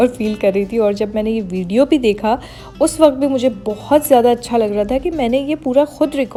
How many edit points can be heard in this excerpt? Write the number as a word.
zero